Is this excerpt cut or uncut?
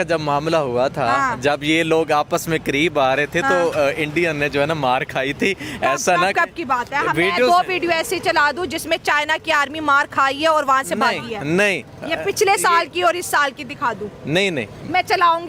uncut